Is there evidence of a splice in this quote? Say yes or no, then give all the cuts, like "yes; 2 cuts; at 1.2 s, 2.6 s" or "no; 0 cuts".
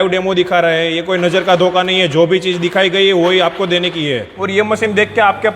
yes; 1 cut; at 4.3 s